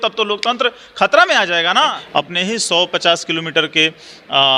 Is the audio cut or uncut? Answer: cut